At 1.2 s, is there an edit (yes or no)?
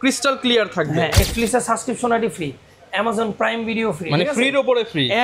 yes